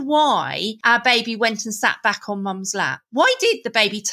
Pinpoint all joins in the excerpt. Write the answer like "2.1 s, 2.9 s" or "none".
none